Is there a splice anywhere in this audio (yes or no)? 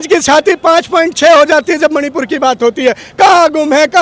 no